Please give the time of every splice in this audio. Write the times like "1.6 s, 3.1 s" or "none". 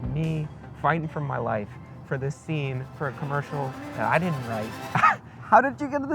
4.8 s